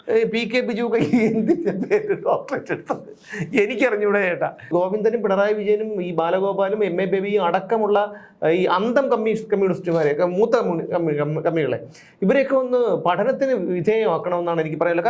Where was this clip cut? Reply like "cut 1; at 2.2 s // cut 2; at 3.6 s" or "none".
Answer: cut 1; at 4.7 s